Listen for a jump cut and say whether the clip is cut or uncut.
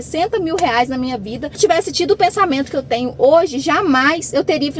cut